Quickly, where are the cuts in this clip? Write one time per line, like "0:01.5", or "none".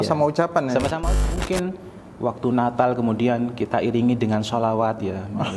0:01.2